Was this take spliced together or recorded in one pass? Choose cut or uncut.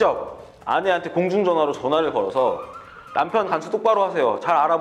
uncut